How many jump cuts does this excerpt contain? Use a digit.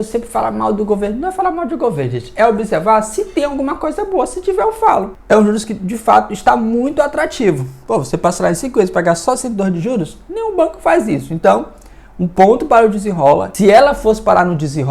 2